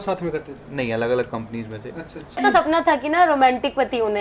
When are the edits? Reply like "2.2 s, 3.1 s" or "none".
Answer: 2.4 s